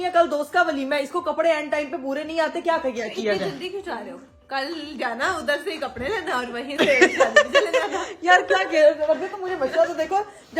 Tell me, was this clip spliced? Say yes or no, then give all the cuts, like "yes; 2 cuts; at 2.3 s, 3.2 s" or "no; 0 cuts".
no; 0 cuts